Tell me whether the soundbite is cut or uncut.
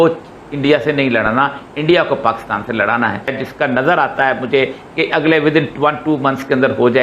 cut